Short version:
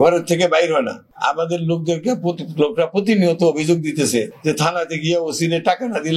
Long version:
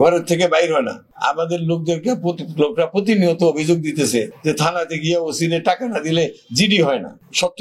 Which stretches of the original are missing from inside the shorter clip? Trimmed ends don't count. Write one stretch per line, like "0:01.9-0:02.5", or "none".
none